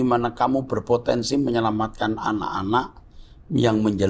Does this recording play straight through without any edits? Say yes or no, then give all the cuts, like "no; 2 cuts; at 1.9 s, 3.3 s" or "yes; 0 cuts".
yes; 0 cuts